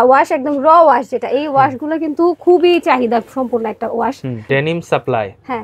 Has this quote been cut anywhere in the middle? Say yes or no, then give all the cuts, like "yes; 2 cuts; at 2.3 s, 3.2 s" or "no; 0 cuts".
yes; 1 cut; at 4.4 s